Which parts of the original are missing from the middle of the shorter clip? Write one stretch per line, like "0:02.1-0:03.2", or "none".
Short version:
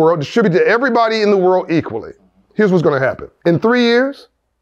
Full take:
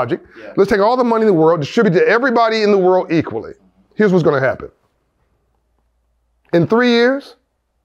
0:04.7-0:06.4

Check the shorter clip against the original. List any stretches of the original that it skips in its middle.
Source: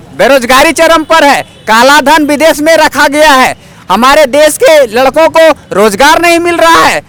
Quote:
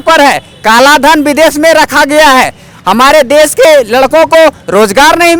none

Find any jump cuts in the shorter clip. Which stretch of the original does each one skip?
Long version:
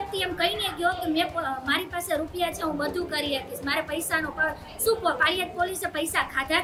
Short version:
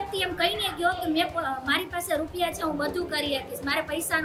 none

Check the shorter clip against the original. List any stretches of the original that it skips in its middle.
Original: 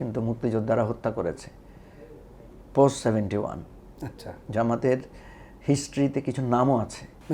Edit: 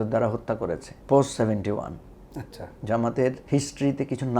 0:01.5-0:02.6
0:05.1-0:05.6

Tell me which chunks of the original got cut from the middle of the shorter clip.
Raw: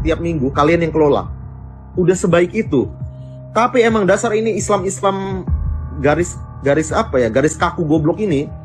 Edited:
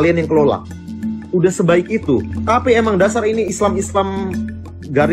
0:03.0-0:03.4

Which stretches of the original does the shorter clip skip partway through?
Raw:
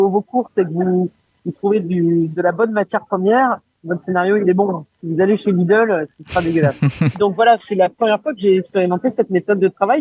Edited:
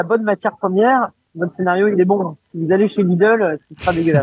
none

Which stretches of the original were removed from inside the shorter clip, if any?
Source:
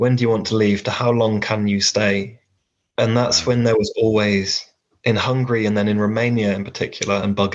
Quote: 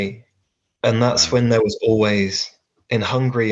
none

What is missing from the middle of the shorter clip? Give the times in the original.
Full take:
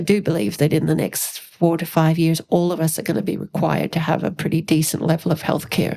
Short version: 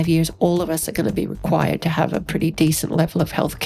none

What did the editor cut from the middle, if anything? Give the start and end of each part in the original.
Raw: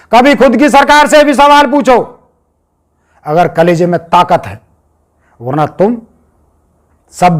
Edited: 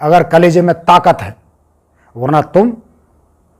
none

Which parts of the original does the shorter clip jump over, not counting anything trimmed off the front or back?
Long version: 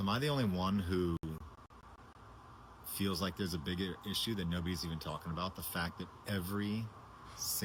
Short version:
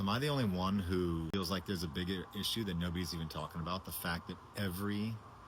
0:01.3-0:03.0

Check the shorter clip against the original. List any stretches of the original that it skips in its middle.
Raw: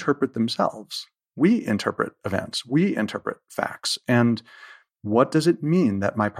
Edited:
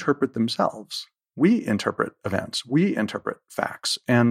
none

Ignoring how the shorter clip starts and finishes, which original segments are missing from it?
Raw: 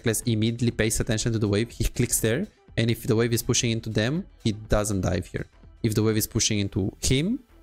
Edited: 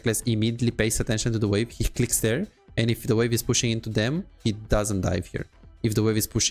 none

